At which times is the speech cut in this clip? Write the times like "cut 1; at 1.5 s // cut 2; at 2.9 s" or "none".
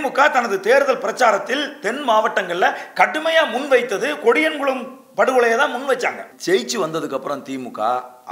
cut 1; at 6.3 s